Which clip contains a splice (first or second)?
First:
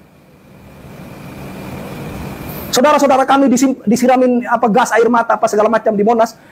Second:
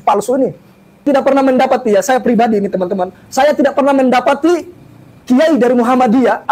second